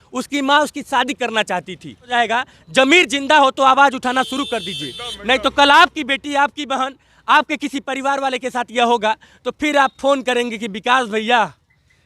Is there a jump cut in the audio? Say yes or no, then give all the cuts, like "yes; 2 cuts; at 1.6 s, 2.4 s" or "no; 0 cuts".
yes; 1 cut; at 2.1 s